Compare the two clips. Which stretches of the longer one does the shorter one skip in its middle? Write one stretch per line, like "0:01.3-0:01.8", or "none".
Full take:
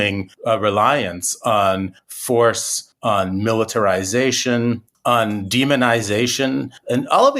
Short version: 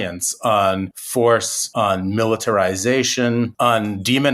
0:02.0-0:02.1
0:02.7-0:02.9
0:04.8-0:05.0